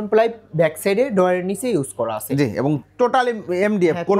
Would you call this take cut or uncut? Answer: uncut